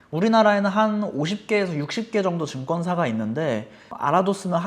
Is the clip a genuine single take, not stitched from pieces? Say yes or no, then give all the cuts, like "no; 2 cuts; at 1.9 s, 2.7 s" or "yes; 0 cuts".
yes; 0 cuts